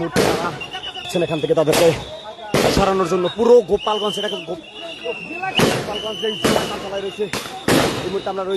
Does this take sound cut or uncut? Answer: cut